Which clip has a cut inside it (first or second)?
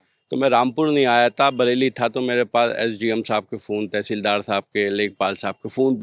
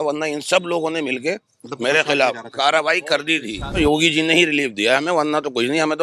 second